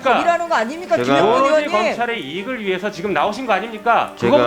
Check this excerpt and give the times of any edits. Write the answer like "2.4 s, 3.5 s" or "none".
none

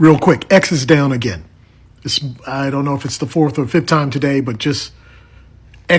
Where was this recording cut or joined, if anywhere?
none

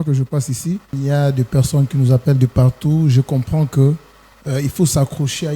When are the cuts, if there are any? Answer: 0.9 s

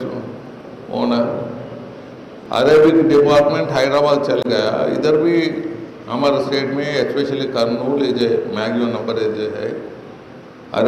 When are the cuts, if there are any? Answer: 2.3 s

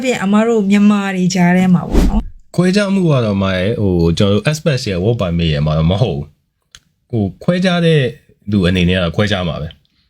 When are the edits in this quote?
2.3 s

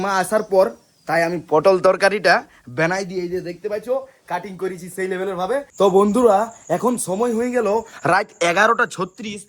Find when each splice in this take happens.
5.7 s

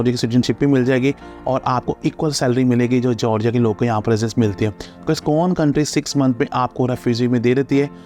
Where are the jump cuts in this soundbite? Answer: none

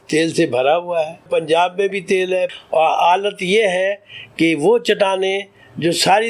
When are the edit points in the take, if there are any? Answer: 1.2 s, 2.5 s

